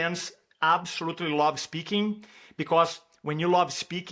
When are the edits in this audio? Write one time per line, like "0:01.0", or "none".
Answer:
none